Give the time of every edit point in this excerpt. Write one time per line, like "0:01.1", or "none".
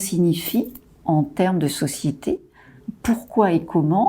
0:01.0
0:02.8